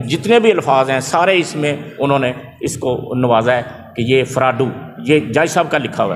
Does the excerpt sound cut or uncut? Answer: uncut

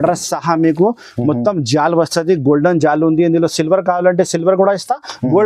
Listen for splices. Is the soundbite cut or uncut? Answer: uncut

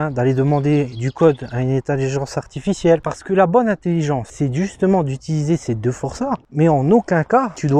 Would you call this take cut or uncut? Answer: cut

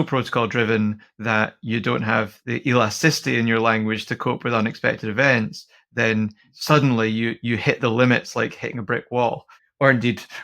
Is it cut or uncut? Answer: cut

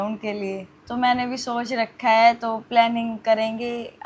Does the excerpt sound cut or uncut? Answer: uncut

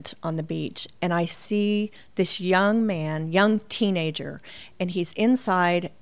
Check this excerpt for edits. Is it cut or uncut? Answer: uncut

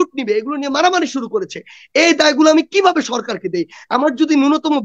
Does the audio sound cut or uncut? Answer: uncut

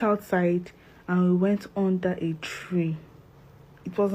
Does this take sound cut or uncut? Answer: uncut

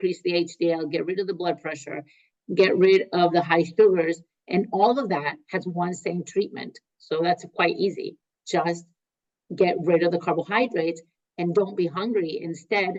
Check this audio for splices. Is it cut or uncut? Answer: uncut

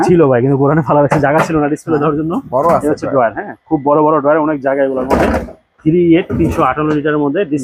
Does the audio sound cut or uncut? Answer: uncut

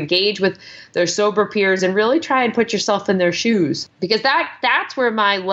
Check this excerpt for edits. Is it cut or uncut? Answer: cut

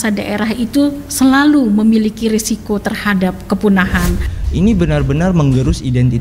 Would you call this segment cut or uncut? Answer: cut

